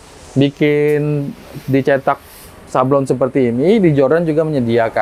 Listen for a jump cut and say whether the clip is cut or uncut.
uncut